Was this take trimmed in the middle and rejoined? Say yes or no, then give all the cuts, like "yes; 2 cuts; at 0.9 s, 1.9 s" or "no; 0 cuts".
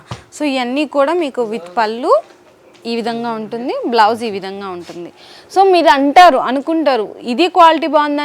no; 0 cuts